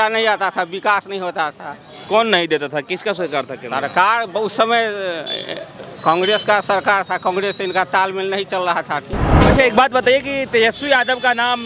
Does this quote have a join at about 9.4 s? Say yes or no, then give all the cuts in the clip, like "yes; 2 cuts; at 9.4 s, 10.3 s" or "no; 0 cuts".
yes; 1 cut; at 9.4 s